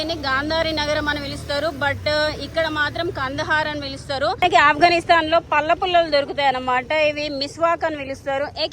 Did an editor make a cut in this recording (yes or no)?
yes